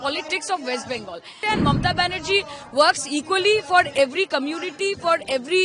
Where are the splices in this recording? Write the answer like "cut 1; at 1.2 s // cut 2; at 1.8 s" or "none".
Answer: cut 1; at 1.3 s